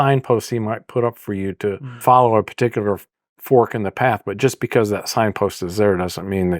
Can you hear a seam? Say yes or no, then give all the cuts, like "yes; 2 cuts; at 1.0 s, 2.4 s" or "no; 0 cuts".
yes; 1 cut; at 2.0 s